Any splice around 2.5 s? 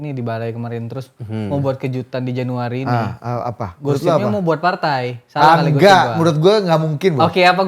no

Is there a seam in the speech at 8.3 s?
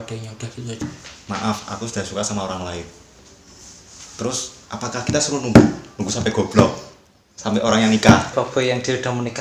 yes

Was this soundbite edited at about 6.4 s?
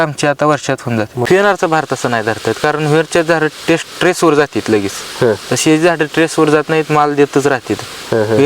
no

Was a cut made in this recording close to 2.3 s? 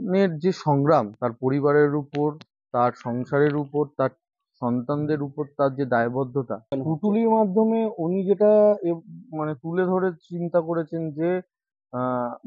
no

